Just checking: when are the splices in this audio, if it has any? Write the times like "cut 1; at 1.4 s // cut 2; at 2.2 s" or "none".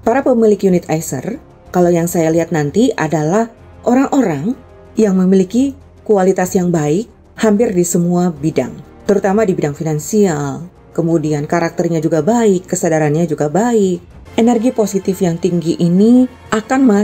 cut 1; at 14.2 s